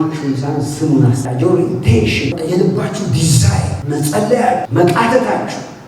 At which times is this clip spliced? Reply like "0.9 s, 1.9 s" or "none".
1.2 s, 2.3 s, 3.8 s, 4.7 s